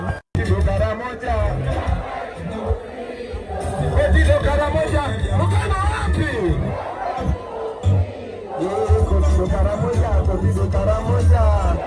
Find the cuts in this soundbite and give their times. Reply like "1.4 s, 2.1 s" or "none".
none